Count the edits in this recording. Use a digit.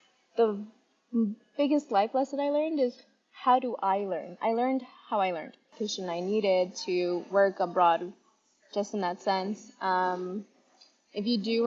1